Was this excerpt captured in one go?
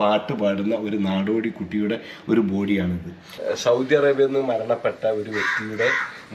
no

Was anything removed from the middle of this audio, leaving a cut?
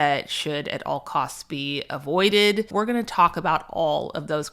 yes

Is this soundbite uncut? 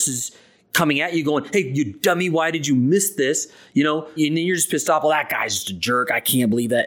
no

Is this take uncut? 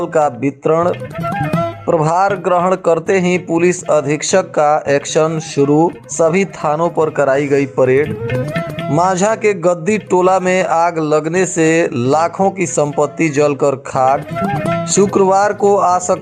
yes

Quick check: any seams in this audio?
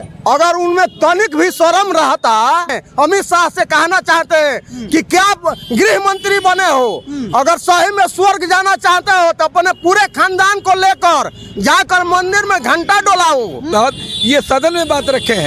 yes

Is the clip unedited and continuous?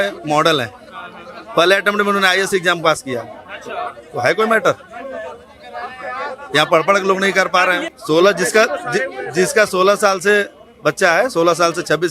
no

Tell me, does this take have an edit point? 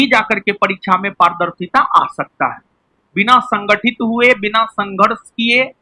no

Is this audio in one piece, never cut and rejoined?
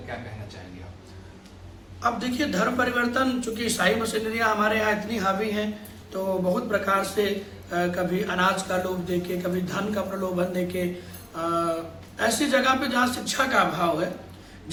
yes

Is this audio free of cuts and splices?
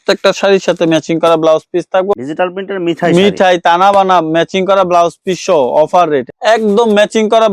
no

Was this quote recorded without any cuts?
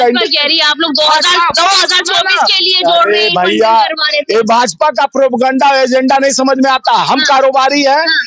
yes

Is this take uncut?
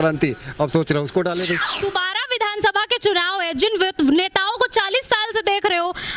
no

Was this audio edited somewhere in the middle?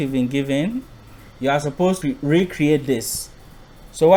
no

